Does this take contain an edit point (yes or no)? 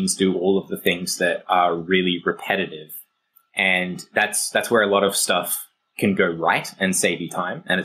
yes